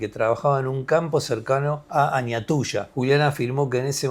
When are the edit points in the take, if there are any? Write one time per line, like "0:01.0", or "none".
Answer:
0:01.8
0:02.9